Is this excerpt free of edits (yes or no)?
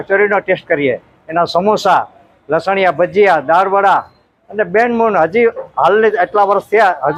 yes